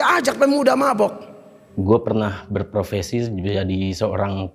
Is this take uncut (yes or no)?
no